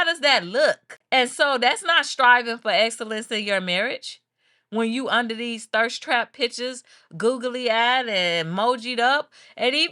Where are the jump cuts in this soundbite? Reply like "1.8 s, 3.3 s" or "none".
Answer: 0.9 s